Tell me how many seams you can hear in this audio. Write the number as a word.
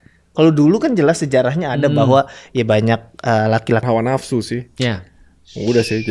one